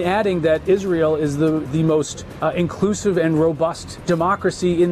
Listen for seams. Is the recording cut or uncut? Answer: cut